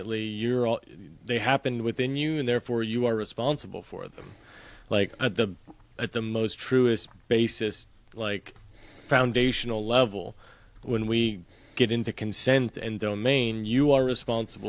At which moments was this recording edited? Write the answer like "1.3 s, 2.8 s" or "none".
none